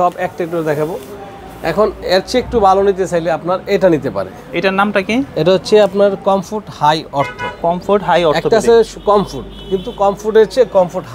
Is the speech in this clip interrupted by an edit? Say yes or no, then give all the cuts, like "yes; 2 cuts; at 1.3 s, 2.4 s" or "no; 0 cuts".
no; 0 cuts